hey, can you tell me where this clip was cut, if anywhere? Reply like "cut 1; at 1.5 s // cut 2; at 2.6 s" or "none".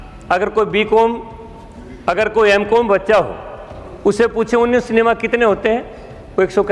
none